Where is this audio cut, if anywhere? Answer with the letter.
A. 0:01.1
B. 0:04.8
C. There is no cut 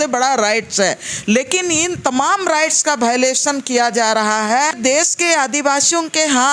B